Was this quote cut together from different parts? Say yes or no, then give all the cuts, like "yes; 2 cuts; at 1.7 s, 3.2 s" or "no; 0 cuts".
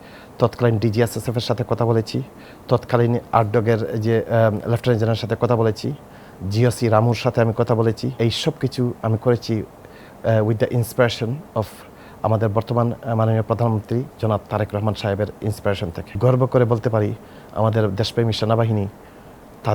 yes; 3 cuts; at 3.2 s, 8.1 s, 16.1 s